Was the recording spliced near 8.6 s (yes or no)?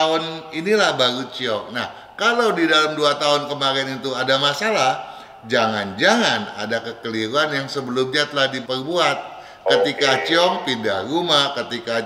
yes